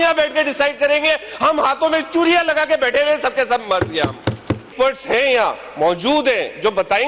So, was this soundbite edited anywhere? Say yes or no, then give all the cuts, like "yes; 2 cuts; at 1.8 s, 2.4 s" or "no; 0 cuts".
yes; 1 cut; at 4.7 s